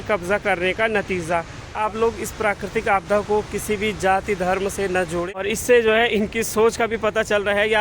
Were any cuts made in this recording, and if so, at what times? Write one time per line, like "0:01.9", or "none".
0:01.7
0:05.4